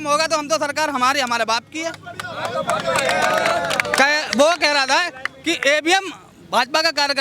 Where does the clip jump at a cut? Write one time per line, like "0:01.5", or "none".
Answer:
none